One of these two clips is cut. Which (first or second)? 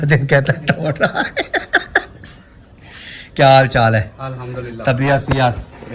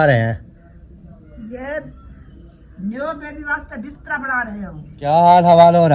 second